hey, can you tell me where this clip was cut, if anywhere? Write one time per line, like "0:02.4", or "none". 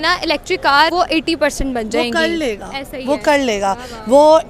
0:00.9